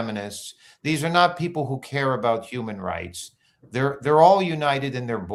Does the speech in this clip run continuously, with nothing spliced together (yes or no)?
yes